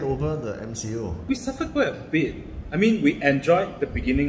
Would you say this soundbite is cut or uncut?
cut